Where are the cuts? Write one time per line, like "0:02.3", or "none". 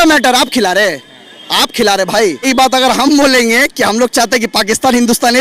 0:02.5